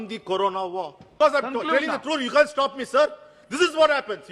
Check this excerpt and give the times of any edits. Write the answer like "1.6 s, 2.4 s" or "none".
1.0 s